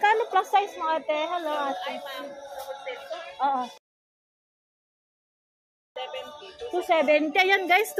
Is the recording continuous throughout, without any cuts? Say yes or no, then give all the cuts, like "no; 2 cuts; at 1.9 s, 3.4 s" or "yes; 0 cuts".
yes; 0 cuts